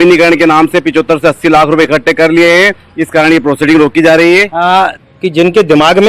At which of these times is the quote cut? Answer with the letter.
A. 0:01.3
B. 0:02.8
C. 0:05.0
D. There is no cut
C